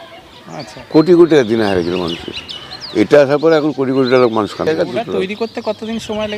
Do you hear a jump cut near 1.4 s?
no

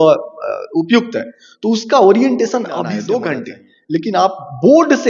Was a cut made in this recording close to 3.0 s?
yes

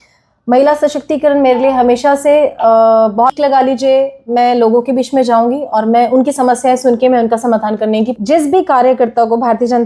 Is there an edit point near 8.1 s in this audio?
yes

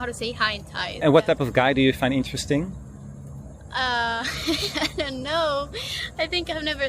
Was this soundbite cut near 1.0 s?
yes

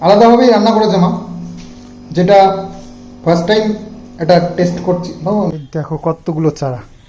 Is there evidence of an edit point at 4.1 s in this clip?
no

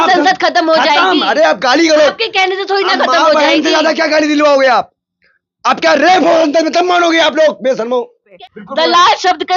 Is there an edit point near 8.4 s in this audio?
yes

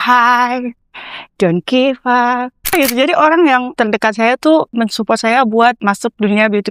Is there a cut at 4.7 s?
yes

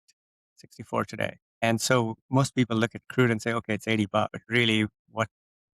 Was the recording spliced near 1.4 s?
yes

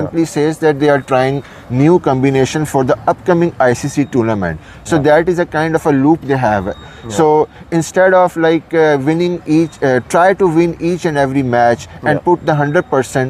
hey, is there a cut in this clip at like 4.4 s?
no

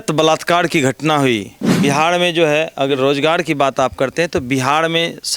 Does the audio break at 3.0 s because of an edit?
no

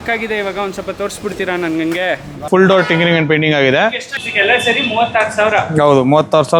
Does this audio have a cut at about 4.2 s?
yes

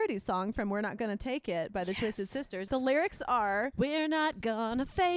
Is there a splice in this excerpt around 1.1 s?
no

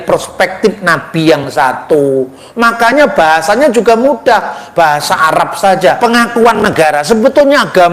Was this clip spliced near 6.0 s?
yes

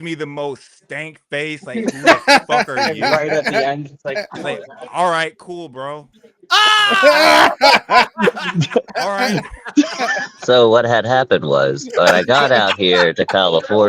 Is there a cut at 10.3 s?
yes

